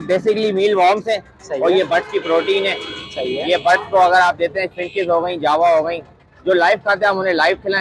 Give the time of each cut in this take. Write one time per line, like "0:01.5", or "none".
none